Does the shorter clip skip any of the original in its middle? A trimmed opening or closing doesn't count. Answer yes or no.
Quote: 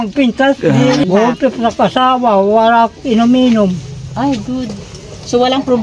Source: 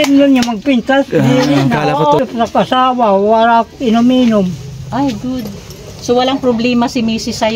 yes